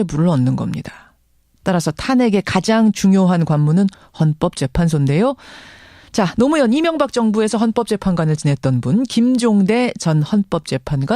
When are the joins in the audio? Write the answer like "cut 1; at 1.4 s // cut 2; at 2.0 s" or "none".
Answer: cut 1; at 3.9 s